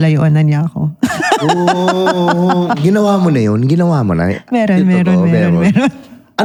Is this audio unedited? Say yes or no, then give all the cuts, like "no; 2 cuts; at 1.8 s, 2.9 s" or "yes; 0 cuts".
yes; 0 cuts